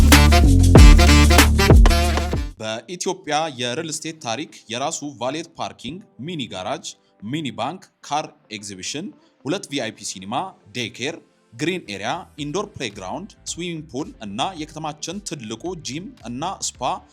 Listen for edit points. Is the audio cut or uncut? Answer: cut